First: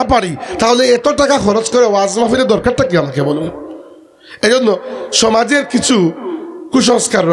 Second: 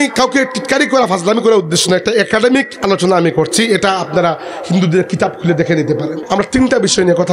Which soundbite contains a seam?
second; 1 cut; at 6.2 s

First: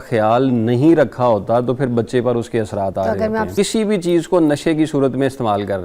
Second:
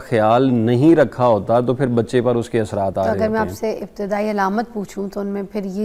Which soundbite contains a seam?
first; 1 cut; at 3.5 s

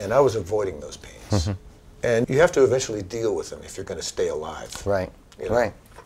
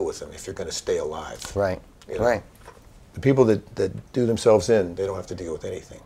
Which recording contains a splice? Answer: first; 1 cut; at 2.2 s

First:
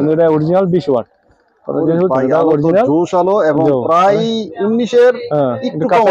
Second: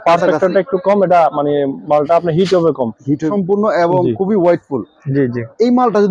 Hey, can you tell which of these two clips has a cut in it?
second; 1 cut; at 3.3 s

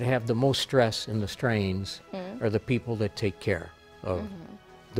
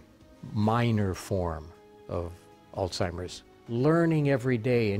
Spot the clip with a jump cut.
second; 1 cut; at 3.5 s

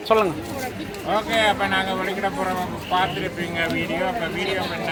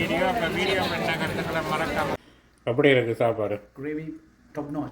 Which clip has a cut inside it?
second; 1 cut; at 2.2 s

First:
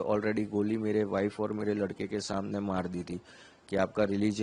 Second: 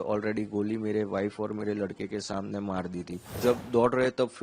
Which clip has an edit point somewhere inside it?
second; 1 cut; at 3.3 s

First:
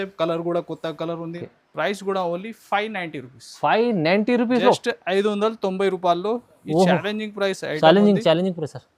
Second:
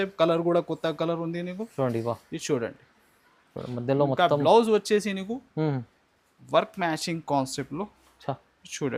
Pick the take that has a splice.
first; 1 cut; at 1.4 s

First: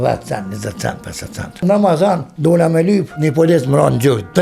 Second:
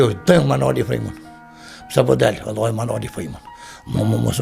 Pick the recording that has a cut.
first; 3 cuts; at 1.6 s, 2.3 s, 3.1 s

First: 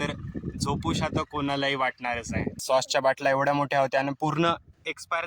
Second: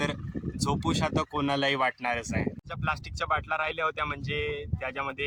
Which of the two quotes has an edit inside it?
first; 1 cut; at 2.6 s

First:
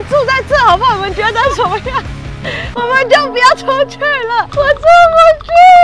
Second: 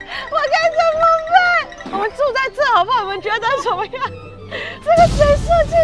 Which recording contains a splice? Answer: second; 2 cuts; at 1.7 s, 4.8 s

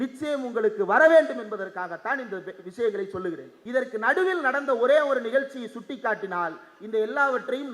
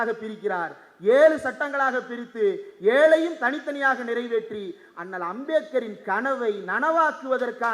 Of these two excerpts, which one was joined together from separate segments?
first; 1 cut; at 3.5 s

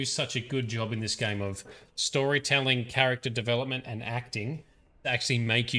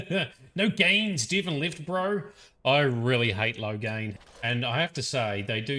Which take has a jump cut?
second; 1 cut; at 4.1 s

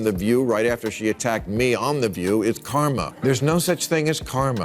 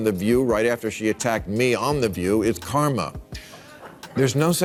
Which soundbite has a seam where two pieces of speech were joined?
first; 1 cut; at 3.1 s

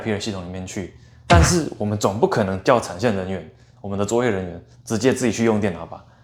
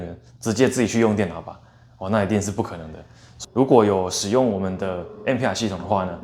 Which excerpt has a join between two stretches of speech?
second; 1 cut; at 3.2 s

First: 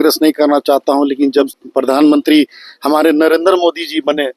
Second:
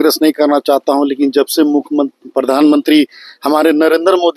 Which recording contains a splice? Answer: first; 1 cut; at 1.5 s

